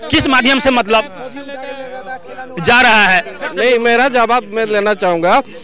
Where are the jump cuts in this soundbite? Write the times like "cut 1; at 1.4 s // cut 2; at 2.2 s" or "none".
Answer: cut 1; at 3.4 s

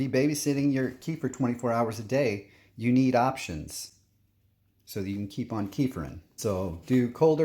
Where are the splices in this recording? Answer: cut 1; at 6.2 s

